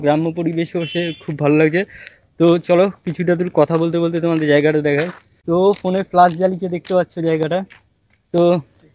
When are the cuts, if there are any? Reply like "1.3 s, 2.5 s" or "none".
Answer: none